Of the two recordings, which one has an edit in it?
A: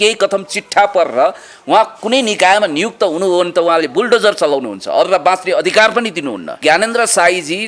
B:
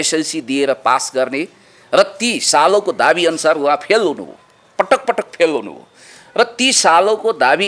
A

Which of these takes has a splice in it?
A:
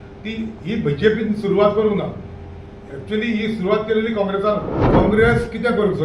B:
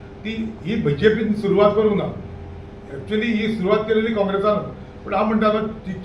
A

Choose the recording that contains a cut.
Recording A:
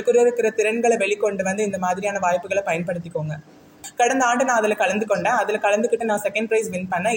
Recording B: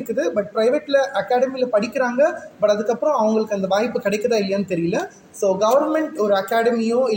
A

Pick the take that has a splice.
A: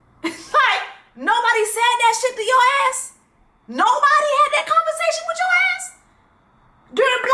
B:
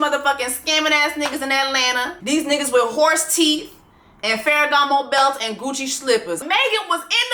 B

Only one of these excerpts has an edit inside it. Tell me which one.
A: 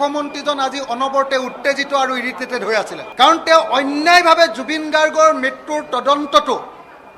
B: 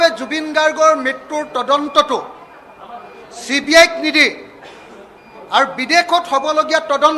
A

